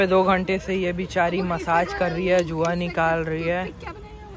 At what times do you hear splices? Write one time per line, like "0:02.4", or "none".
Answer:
none

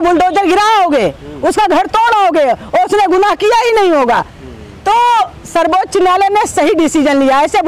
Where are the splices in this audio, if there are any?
none

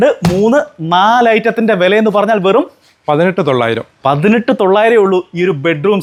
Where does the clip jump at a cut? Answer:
none

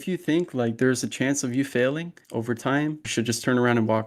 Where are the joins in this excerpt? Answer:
0:02.2
0:03.0

